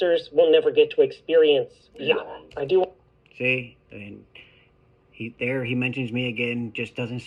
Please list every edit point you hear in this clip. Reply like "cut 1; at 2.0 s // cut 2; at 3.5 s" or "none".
none